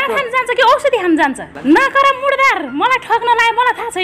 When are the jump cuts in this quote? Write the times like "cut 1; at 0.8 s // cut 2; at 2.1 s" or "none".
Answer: cut 1; at 1.5 s